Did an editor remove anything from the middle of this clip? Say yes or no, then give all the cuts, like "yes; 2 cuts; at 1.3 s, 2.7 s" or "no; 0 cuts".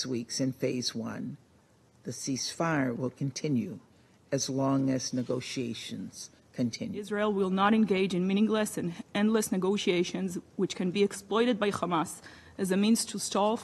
yes; 1 cut; at 7.1 s